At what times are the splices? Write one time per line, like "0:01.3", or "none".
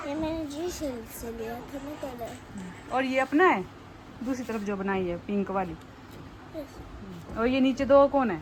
none